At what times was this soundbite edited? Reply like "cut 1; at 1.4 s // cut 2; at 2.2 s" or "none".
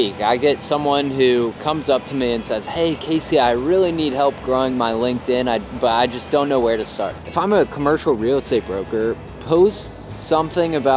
cut 1; at 7.2 s